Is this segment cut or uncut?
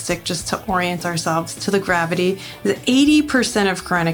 cut